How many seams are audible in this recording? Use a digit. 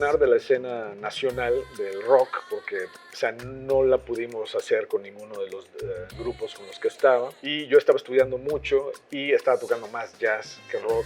1